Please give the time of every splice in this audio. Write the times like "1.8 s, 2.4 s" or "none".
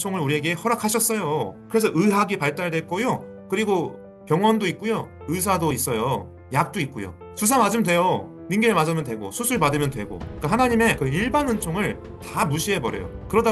none